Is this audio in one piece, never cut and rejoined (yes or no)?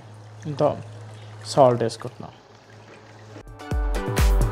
yes